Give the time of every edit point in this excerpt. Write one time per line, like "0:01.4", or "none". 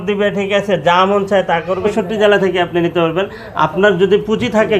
0:01.9